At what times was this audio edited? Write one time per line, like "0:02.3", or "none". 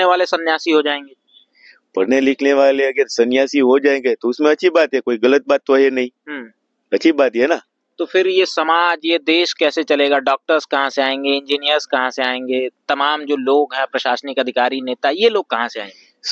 none